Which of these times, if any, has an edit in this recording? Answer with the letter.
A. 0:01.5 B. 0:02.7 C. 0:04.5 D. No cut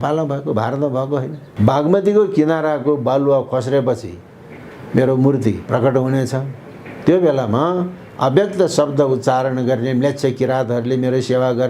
A